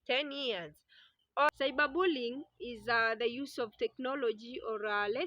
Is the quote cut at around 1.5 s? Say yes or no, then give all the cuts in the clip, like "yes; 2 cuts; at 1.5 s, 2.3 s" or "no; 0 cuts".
yes; 1 cut; at 1.5 s